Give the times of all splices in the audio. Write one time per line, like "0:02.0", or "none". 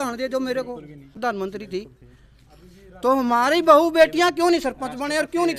0:01.1